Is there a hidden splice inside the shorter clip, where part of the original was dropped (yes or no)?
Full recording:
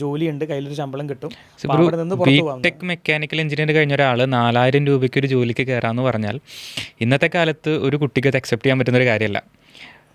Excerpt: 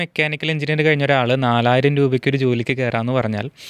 no